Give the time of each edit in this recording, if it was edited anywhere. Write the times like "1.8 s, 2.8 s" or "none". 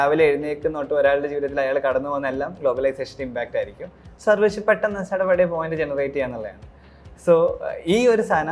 none